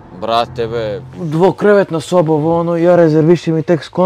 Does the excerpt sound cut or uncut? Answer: cut